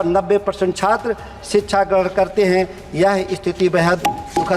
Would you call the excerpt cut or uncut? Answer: uncut